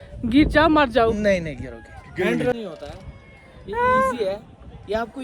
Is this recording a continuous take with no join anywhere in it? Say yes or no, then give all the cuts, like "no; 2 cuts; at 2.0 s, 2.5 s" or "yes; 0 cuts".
no; 1 cut; at 2.5 s